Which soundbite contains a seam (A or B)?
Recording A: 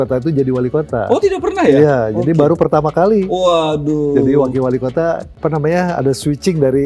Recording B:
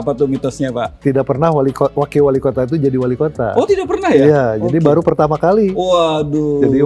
A